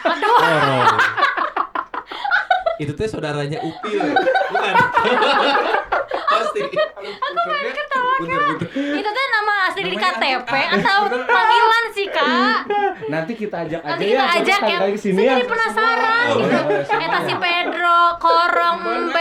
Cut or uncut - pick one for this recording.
uncut